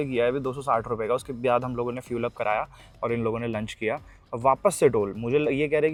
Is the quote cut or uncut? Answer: uncut